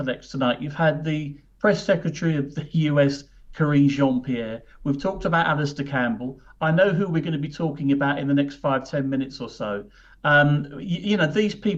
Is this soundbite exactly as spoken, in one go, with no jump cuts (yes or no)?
yes